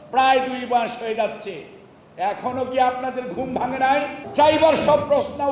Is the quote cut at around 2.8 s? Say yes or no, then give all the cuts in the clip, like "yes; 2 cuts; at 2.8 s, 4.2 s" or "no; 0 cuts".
no; 1 cut; at 4.2 s